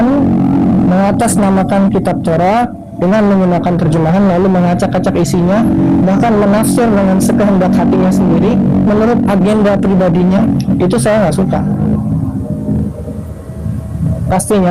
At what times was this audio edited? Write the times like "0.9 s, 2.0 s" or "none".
none